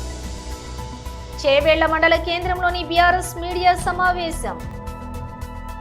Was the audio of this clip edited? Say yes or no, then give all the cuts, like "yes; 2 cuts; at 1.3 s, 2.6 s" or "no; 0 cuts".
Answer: no; 0 cuts